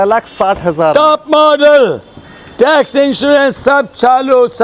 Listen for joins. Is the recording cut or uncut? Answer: uncut